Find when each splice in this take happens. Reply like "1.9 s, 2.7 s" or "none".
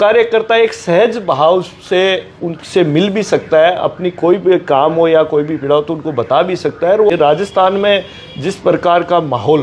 7.1 s